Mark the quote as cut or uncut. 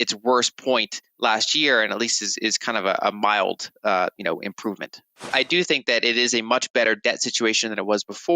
cut